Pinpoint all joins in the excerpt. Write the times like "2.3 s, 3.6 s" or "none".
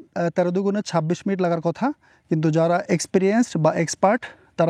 none